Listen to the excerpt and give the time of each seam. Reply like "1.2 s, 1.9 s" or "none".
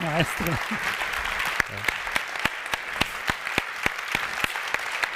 none